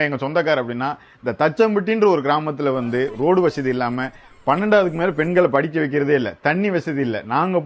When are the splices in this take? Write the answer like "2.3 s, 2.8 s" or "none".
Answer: none